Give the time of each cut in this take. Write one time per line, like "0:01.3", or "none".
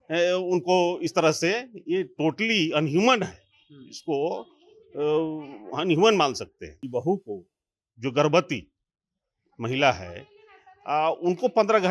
0:06.8